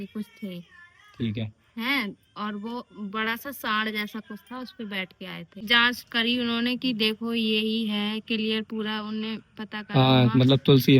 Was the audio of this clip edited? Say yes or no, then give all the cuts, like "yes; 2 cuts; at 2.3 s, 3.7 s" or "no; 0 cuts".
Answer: yes; 1 cut; at 5.6 s